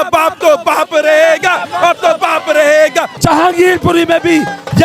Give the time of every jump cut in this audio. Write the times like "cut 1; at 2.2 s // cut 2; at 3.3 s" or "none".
cut 1; at 3.1 s